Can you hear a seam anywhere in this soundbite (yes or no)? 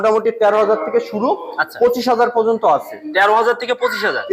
no